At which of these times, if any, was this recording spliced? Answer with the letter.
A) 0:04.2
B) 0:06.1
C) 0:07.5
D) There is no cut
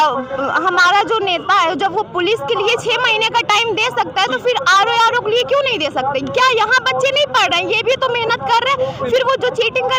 D